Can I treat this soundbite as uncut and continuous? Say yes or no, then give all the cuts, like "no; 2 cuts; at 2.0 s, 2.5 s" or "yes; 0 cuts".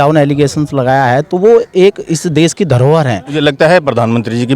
no; 1 cut; at 3.4 s